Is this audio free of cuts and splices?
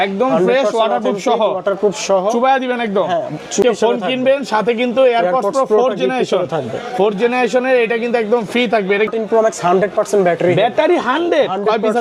no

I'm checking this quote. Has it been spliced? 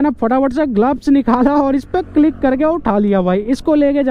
no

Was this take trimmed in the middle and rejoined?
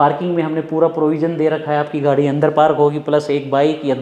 no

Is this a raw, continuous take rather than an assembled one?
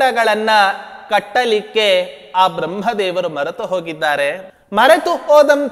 no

